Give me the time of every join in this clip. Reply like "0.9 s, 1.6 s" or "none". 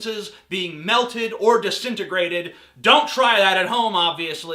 0.9 s